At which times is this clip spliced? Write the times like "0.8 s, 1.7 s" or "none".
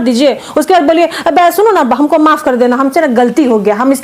none